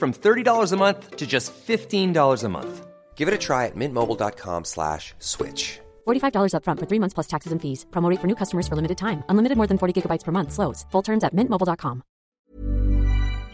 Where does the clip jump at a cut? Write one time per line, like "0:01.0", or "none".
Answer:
0:12.4